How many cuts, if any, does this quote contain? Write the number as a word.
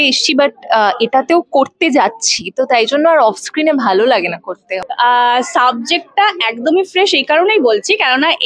one